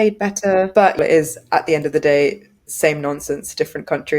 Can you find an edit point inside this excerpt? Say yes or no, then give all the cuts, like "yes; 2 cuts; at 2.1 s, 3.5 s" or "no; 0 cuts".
yes; 1 cut; at 1.0 s